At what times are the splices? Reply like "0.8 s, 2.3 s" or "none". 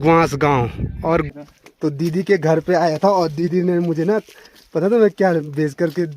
1.3 s